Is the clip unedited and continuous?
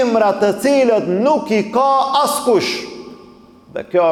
yes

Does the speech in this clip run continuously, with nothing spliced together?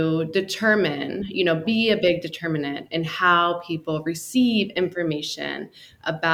yes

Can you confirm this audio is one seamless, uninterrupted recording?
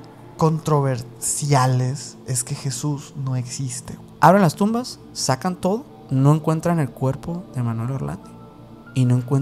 no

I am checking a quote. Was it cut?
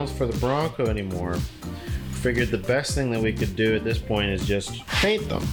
no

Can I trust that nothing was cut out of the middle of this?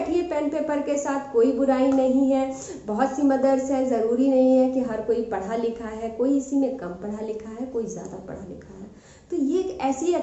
yes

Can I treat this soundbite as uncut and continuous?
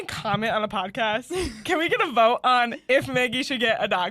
yes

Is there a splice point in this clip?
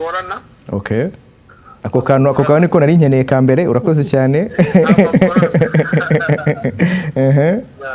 no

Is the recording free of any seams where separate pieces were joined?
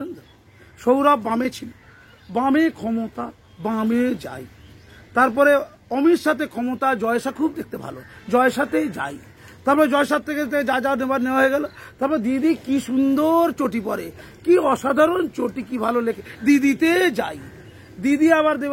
yes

